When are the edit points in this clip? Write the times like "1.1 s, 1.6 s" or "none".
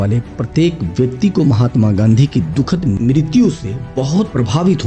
none